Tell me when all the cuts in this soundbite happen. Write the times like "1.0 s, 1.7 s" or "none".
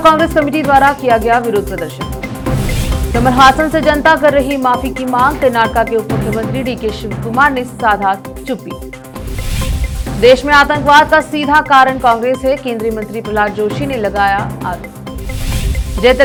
none